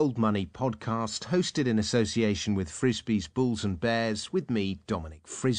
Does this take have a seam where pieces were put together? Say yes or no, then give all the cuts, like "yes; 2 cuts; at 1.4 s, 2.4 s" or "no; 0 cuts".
no; 0 cuts